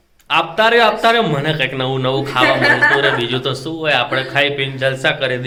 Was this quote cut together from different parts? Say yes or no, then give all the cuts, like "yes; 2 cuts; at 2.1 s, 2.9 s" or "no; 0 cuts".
no; 0 cuts